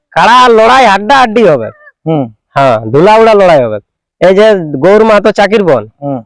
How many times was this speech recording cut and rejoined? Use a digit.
0